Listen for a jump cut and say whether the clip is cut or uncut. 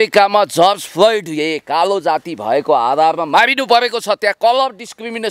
uncut